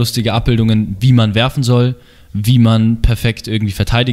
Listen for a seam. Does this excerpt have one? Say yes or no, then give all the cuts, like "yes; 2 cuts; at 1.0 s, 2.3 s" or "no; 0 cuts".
no; 0 cuts